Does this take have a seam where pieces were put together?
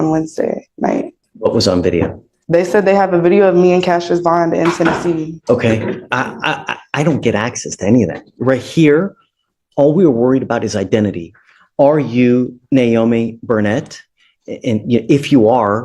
yes; 2 cuts; at 1.2 s, 5.4 s

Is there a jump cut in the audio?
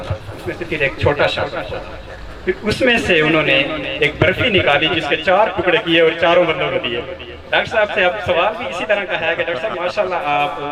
no; 0 cuts

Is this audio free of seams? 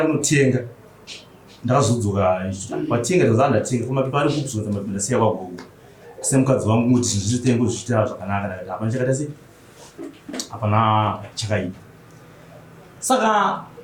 yes; 0 cuts

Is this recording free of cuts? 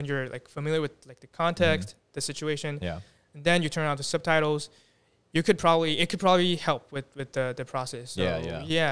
yes; 0 cuts

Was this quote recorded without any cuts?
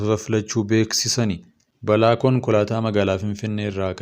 no; 1 cut; at 1.1 s

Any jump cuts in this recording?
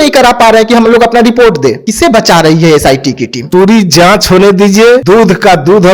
yes; 3 cuts; at 1.8 s, 3.3 s, 5.0 s

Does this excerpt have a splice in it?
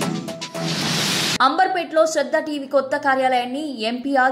yes; 1 cut; at 1.3 s

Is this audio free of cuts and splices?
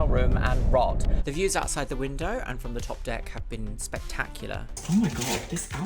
no; 2 cuts; at 1.1 s, 4.8 s

